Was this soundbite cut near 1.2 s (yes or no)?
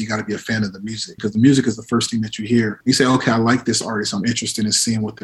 yes